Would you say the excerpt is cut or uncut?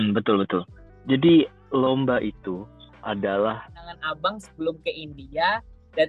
cut